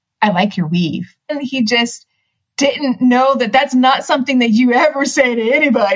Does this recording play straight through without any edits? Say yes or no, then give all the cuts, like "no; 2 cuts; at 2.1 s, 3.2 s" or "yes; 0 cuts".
no; 1 cut; at 1.4 s